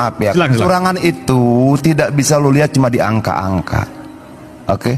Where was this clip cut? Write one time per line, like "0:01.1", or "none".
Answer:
none